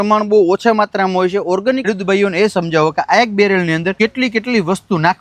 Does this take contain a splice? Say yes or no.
yes